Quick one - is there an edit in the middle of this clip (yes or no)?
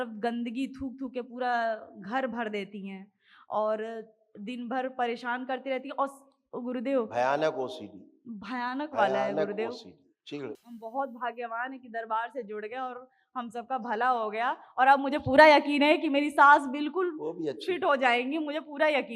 yes